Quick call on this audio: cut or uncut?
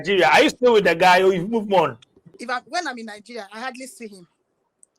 cut